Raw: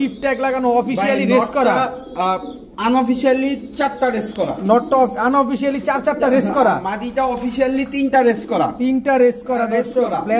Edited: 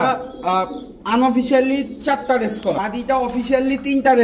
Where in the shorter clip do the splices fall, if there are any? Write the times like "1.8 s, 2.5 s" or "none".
2.8 s